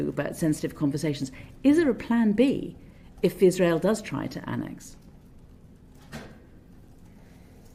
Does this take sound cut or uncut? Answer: uncut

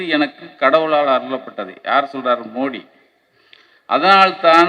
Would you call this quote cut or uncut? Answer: uncut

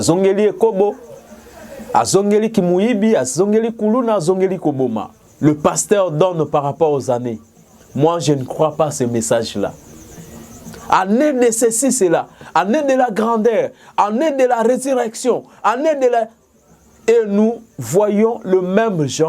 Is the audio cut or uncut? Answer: cut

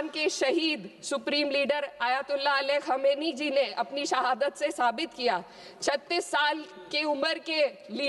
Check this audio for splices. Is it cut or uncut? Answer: uncut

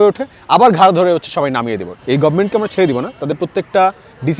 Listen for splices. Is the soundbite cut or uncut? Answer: cut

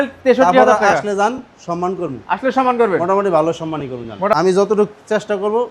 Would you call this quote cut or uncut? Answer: cut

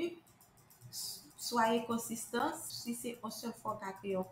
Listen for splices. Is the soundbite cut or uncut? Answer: cut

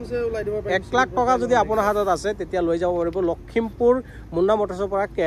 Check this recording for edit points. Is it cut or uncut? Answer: uncut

